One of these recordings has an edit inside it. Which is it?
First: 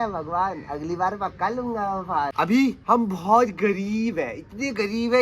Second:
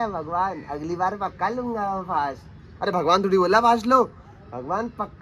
first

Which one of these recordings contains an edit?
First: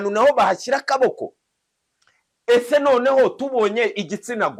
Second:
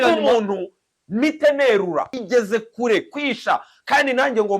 second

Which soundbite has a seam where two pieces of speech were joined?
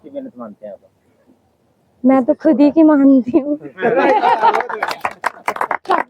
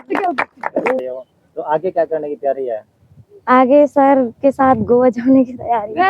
second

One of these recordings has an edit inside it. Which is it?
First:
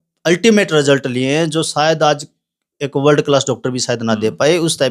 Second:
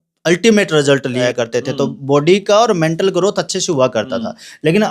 second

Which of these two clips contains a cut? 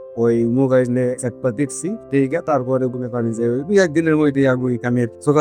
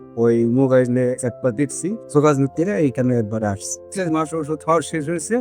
second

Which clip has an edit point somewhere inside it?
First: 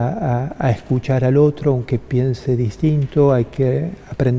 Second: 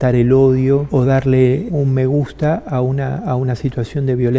second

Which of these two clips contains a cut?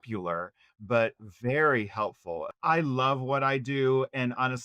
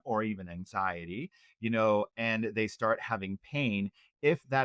first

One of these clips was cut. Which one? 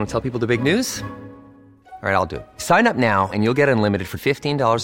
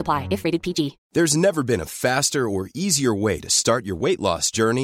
second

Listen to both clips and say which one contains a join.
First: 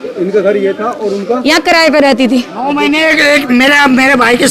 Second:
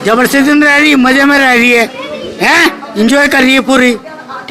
first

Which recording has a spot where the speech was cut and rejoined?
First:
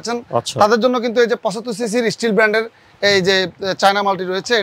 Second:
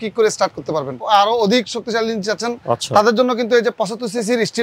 second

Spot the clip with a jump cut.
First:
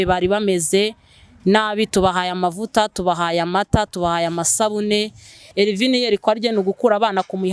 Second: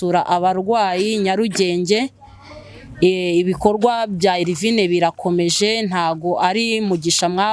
first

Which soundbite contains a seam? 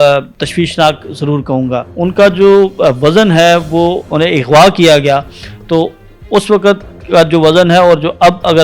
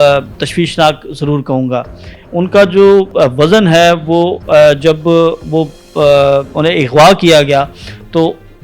first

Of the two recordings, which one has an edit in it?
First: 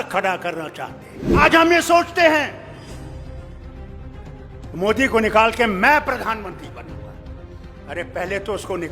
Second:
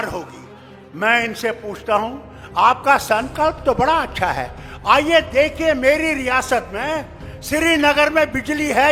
first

